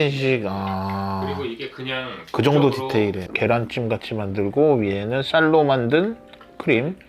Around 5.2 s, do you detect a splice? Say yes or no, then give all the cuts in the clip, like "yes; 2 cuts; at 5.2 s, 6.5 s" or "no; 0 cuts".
no; 1 cut; at 3.3 s